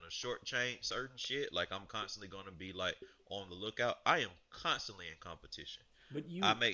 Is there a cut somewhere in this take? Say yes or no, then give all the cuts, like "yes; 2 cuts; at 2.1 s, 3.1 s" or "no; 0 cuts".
no; 0 cuts